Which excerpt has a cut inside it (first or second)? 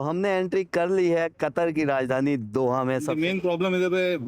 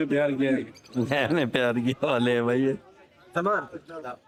first